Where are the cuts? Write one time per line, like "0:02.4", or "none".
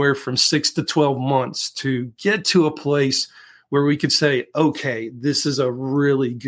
none